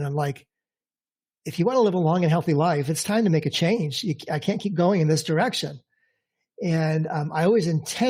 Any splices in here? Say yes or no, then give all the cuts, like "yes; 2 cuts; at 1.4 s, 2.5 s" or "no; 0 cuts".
no; 0 cuts